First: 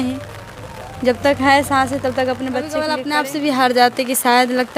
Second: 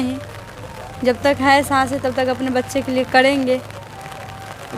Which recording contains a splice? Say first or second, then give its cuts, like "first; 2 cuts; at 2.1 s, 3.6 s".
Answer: first; 1 cut; at 2.9 s